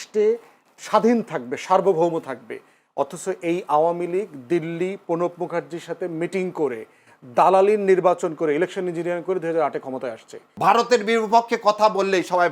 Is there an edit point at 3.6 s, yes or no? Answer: no